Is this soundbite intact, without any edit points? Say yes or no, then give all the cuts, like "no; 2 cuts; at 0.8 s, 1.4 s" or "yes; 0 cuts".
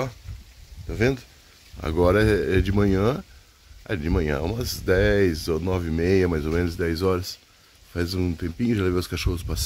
yes; 0 cuts